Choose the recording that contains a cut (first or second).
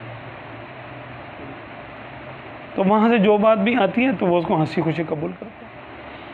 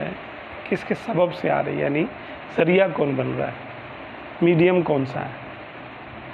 first